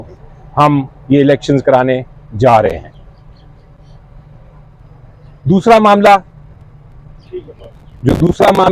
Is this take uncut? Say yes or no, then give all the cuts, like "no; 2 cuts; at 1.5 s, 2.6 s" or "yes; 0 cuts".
yes; 0 cuts